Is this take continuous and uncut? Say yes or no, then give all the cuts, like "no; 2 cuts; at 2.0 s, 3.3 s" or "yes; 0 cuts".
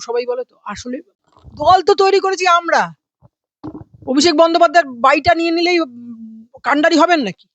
no; 1 cut; at 1.2 s